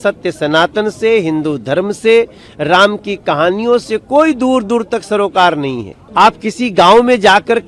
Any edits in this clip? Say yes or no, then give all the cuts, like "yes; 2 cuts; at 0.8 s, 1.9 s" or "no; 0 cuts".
yes; 1 cut; at 5.9 s